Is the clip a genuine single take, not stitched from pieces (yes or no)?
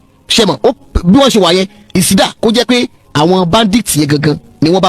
no